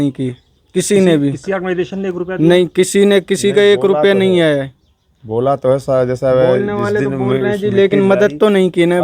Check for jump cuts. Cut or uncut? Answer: uncut